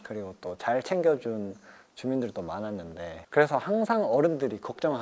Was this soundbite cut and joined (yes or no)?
yes